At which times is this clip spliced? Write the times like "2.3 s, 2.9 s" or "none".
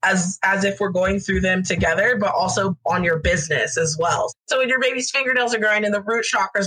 4.3 s